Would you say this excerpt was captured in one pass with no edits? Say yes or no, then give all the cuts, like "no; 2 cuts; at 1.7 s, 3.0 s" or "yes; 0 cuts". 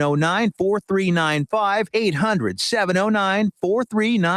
no; 1 cut; at 1.9 s